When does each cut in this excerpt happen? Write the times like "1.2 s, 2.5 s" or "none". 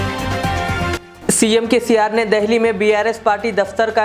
1.0 s